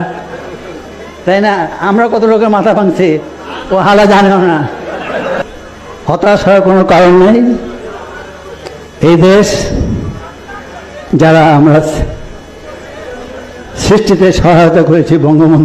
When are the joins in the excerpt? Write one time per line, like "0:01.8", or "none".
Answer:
0:05.5